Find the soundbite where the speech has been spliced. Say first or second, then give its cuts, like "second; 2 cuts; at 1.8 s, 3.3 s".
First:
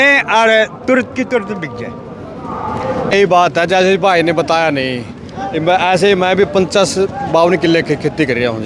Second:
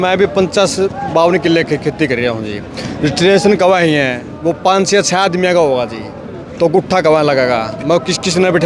first; 1 cut; at 3.1 s